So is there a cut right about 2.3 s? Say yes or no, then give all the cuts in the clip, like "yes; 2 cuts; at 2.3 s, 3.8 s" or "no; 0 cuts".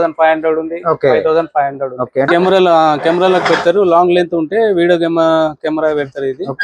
yes; 1 cut; at 2.3 s